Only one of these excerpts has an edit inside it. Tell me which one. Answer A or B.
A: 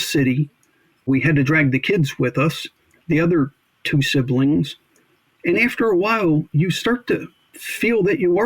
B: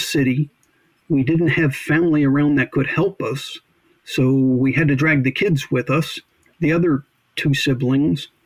A